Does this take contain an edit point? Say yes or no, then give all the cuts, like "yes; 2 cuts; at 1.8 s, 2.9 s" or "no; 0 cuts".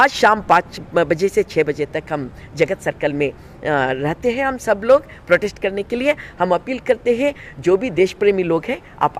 no; 0 cuts